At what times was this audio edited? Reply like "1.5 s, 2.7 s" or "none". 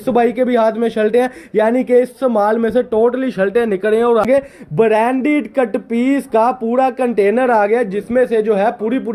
4.2 s